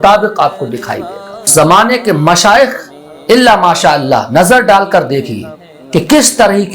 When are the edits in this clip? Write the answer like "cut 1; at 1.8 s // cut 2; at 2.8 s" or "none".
cut 1; at 1.4 s